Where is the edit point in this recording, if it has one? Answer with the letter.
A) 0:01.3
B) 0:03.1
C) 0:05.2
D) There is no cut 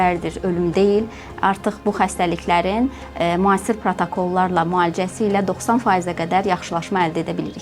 D